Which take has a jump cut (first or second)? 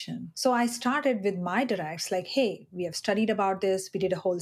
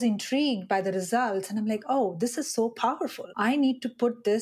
second